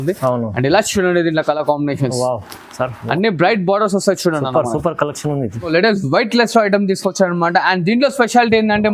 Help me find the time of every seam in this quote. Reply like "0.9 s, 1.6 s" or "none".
5.7 s